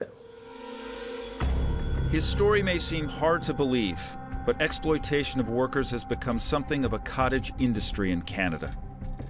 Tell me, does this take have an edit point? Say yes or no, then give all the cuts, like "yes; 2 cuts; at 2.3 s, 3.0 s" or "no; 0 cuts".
no; 0 cuts